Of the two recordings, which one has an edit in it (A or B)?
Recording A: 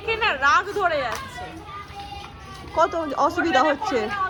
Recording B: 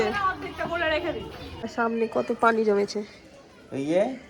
B